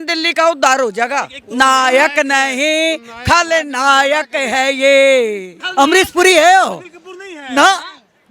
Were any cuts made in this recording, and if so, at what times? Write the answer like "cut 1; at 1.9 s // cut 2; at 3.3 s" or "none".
cut 1; at 1.4 s // cut 2; at 5.6 s